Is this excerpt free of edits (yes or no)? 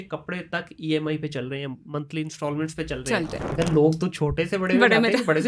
no